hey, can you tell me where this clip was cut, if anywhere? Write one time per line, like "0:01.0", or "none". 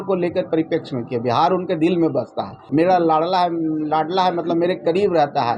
0:02.5